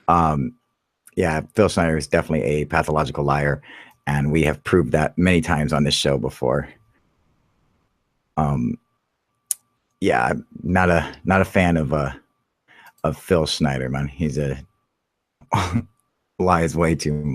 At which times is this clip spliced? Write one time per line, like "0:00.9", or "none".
0:02.1